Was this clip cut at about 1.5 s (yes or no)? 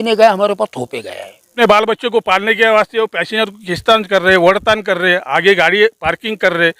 yes